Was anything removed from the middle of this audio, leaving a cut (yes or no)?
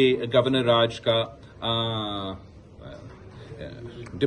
no